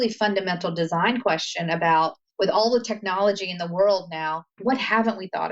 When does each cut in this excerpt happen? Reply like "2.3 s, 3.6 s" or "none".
2.2 s, 4.5 s